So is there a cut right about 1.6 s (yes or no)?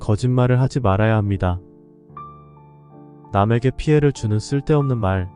no